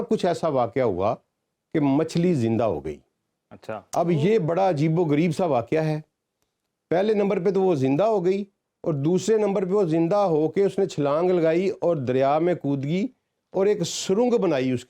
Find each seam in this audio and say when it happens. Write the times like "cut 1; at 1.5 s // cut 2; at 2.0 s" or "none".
none